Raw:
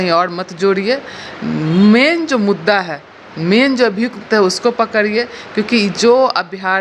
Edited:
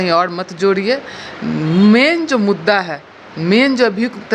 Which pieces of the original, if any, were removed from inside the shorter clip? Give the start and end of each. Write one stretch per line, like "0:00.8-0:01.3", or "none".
none